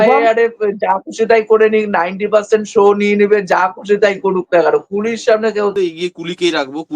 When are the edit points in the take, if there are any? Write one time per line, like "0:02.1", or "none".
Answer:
0:05.7

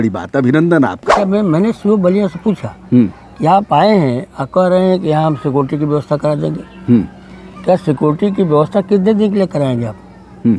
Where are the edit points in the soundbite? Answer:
0:01.2

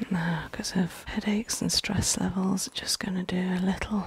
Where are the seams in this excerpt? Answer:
0:01.0

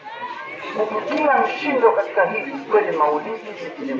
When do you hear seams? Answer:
none

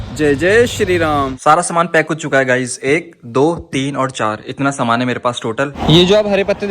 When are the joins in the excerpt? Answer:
0:01.3
0:05.8

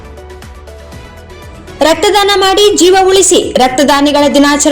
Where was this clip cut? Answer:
0:01.4

